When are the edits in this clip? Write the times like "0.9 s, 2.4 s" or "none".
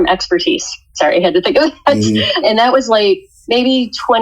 2.4 s, 3.3 s